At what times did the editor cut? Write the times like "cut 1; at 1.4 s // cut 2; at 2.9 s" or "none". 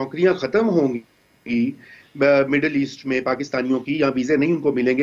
cut 1; at 1.9 s